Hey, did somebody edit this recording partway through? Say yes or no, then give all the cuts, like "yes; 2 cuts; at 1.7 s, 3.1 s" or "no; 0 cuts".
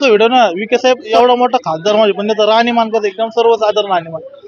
yes; 1 cut; at 1.1 s